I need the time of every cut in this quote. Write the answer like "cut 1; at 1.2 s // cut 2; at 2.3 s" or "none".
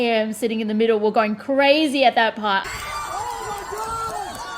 cut 1; at 2.6 s